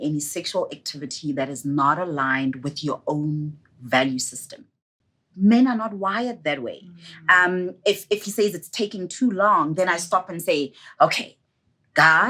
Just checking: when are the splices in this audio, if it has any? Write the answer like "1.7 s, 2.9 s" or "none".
4.9 s